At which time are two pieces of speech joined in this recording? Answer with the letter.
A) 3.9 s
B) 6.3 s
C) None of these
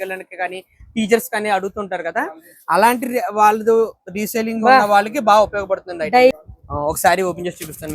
B